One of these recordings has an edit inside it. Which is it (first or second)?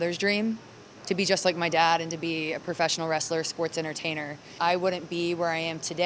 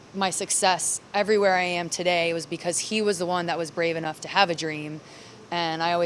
first